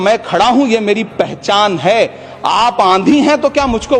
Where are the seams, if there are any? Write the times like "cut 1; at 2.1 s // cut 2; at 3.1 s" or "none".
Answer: none